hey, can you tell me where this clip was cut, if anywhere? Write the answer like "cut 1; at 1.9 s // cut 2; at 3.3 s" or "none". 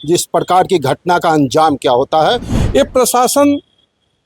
cut 1; at 2.5 s